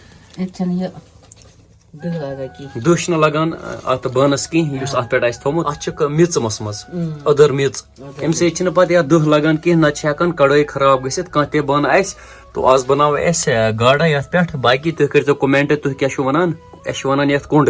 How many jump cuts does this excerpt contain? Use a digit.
0